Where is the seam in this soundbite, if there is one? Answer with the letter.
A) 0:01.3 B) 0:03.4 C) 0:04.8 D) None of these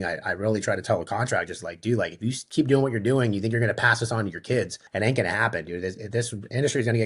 C